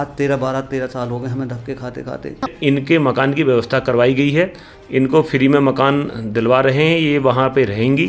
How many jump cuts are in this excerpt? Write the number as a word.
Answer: one